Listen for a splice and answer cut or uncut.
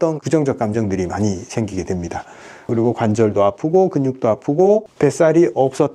cut